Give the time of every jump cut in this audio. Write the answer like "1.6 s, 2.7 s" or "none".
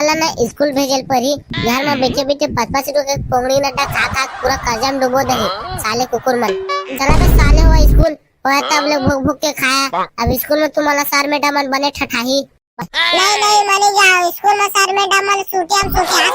6.9 s, 12.8 s

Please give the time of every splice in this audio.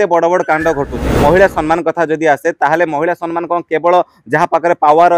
1.1 s

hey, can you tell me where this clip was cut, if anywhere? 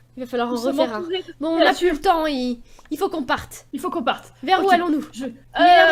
none

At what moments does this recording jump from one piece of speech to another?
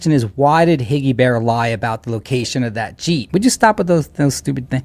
3.2 s

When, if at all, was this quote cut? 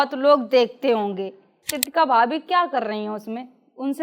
1.8 s

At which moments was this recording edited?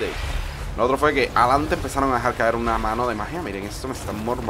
none

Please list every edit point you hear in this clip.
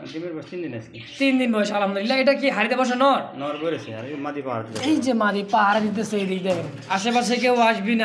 none

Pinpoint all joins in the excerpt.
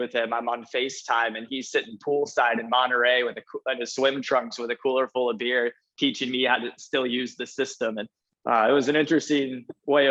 none

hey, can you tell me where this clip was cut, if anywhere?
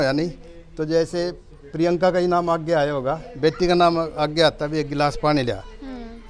none

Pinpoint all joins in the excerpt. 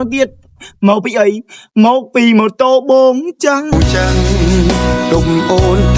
3.7 s

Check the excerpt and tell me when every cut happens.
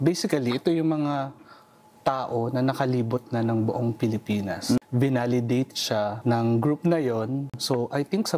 4.8 s, 6.2 s, 7.6 s

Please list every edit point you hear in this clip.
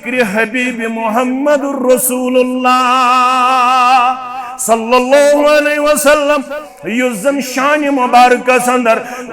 6.6 s

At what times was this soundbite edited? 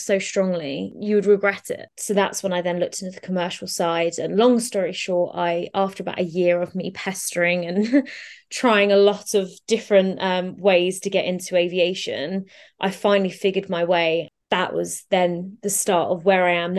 0.9 s, 1.9 s, 14.3 s

